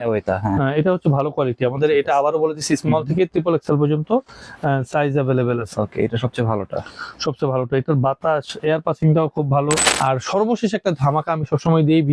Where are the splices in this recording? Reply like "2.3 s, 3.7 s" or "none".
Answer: 9.8 s

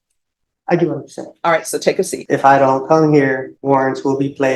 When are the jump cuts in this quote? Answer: 2.2 s, 3.5 s

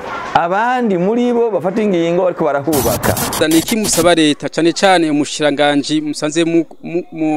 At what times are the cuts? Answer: 3.3 s

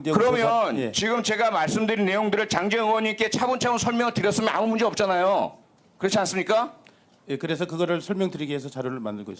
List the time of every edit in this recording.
none

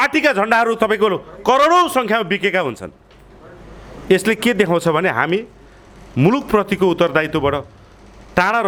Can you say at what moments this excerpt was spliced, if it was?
none

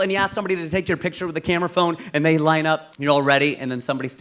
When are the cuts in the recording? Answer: 2.9 s

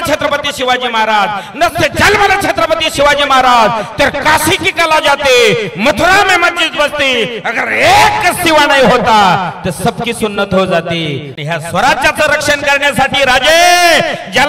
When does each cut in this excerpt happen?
11.3 s

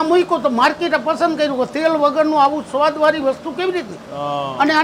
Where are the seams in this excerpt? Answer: none

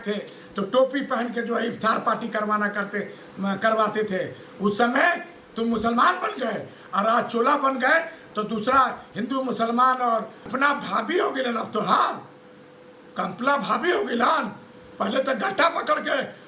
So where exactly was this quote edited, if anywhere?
10.5 s

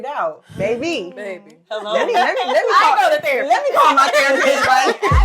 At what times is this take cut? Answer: none

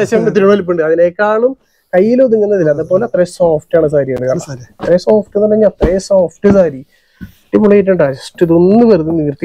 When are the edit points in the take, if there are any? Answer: none

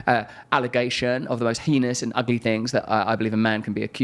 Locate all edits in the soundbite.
none

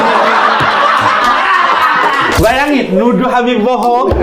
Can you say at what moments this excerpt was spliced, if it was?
2.4 s

